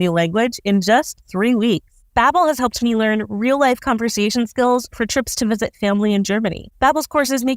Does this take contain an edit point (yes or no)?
yes